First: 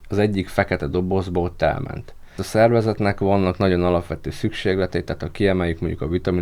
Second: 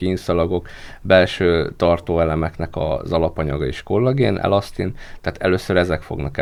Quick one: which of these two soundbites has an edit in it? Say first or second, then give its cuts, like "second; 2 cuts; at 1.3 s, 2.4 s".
first; 1 cut; at 2.4 s